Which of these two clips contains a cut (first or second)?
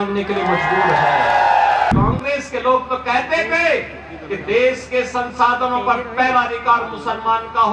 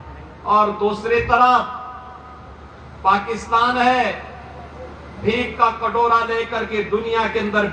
first